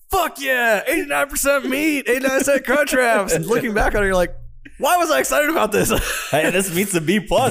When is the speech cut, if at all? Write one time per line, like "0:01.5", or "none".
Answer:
0:03.4